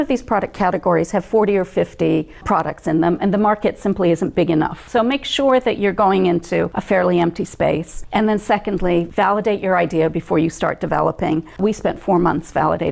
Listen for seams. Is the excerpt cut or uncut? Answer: cut